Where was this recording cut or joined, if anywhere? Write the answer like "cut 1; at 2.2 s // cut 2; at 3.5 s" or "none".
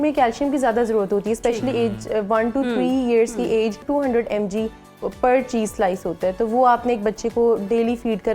cut 1; at 3.8 s

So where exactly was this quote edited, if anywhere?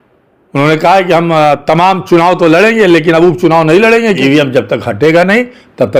cut 1; at 4.2 s

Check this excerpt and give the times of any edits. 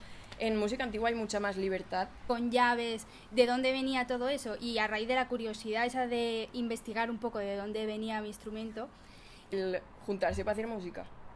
cut 1; at 2.2 s // cut 2; at 9.5 s

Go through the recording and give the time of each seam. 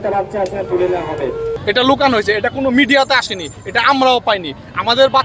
cut 1; at 1.6 s

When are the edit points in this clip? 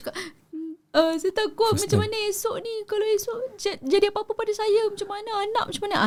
none

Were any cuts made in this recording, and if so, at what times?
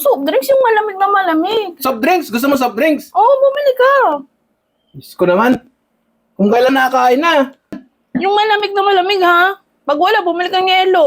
cut 1; at 7.8 s

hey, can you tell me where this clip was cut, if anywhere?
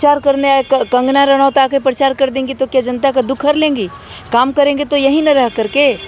none

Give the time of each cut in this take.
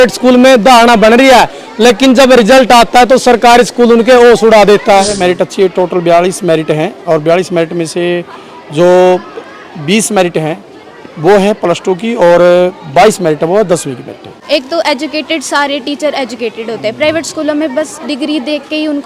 cut 1; at 5.1 s // cut 2; at 14.3 s

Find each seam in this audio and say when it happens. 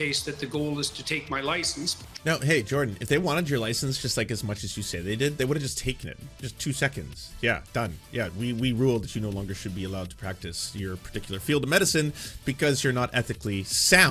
cut 1; at 2.0 s

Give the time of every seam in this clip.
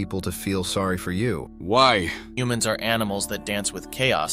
cut 1; at 1.5 s // cut 2; at 2.3 s

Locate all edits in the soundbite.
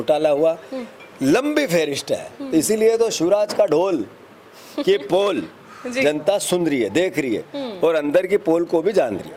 none

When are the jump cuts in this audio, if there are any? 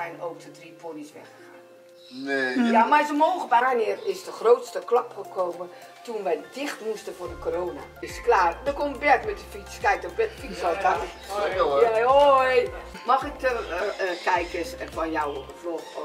cut 1; at 3.6 s // cut 2; at 8.0 s // cut 3; at 12.9 s

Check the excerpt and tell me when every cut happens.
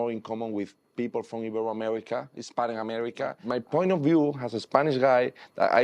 cut 1; at 3.5 s

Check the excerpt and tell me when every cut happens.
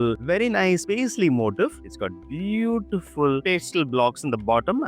cut 1; at 1.9 s

